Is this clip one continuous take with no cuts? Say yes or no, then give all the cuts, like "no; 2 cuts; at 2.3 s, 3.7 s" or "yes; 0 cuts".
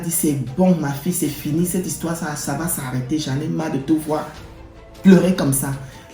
yes; 0 cuts